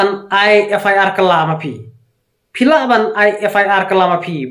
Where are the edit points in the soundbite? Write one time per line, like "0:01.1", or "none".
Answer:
none